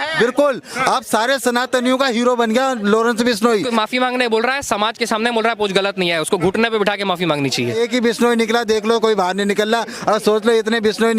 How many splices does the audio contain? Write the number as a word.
two